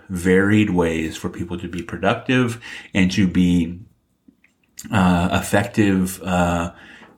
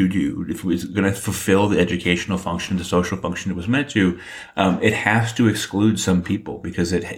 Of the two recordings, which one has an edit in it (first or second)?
first